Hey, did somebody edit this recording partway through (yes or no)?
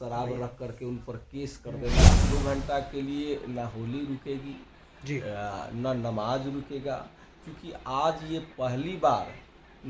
yes